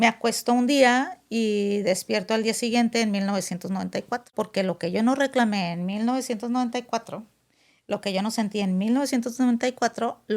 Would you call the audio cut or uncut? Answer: cut